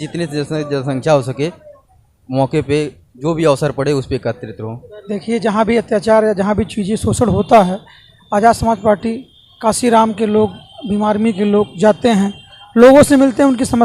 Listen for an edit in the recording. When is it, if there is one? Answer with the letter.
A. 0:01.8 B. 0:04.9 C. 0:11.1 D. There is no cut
B